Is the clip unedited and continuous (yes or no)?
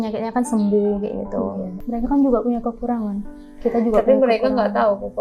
no